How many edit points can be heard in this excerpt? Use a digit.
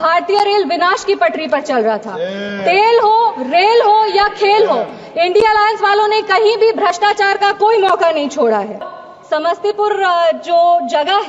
1